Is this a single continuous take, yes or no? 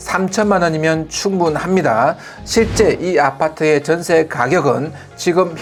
yes